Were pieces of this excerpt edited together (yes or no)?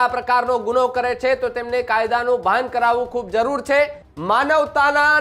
yes